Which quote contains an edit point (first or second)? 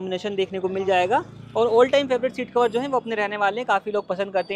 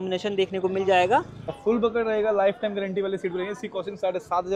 second